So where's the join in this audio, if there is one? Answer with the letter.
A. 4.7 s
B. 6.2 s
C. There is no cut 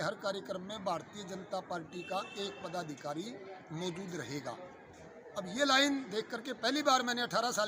C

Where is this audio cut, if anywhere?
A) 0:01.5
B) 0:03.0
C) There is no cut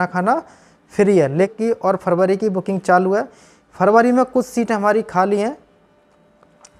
A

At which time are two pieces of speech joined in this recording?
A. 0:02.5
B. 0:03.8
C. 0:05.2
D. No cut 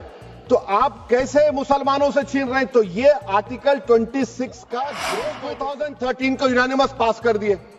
C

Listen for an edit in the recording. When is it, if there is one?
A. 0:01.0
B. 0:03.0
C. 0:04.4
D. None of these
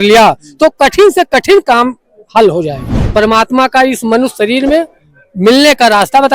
B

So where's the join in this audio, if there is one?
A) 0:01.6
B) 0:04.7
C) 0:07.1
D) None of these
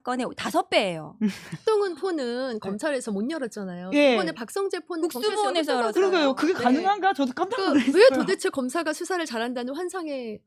A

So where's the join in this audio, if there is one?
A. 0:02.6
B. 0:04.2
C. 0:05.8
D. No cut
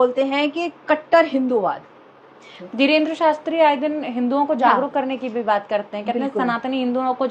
A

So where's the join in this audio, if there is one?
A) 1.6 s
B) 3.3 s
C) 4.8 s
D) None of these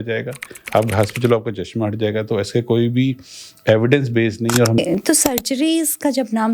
C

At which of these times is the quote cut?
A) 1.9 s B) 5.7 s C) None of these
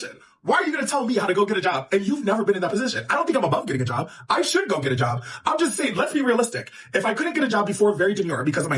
C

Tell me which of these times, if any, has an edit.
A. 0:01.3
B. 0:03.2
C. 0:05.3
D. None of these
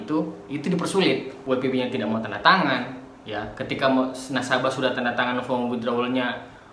A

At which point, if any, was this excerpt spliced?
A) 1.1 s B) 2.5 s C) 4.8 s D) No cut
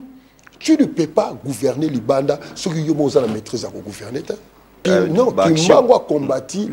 C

